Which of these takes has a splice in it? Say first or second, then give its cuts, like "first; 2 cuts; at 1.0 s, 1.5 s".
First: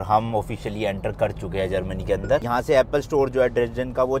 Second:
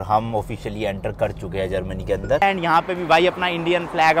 second; 1 cut; at 2.4 s